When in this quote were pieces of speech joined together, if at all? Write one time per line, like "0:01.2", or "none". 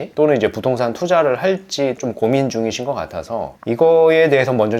0:02.0